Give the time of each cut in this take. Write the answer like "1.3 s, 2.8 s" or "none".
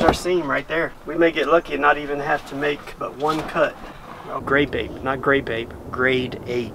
1.0 s, 4.4 s